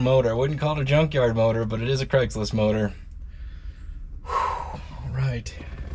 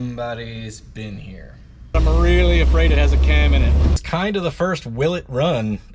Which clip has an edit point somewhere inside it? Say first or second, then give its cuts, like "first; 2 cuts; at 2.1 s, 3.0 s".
second; 2 cuts; at 1.9 s, 4.0 s